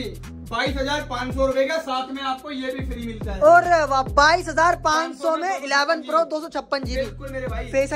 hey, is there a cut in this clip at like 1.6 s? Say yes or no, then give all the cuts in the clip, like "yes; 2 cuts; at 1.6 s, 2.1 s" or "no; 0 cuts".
no; 0 cuts